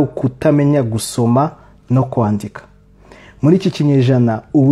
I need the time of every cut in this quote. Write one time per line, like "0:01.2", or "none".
none